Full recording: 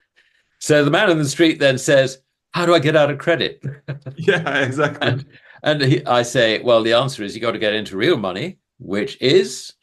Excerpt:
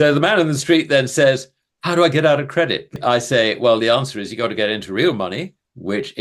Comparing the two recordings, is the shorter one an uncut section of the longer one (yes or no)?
no